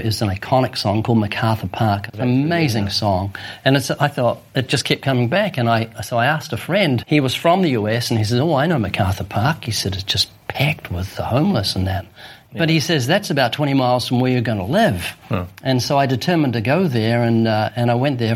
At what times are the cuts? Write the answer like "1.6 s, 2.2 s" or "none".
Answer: 2.1 s, 7.0 s, 12.4 s